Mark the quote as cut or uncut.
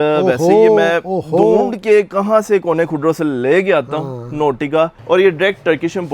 cut